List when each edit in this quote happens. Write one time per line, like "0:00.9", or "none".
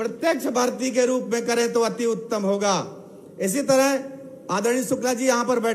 none